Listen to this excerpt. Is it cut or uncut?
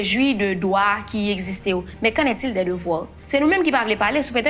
cut